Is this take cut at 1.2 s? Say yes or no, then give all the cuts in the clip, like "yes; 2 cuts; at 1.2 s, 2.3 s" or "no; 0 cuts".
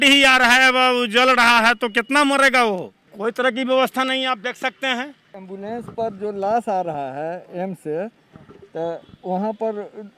no; 2 cuts; at 3.0 s, 5.4 s